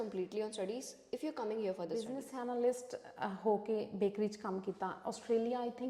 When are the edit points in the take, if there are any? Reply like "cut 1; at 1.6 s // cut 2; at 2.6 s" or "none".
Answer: cut 1; at 2.2 s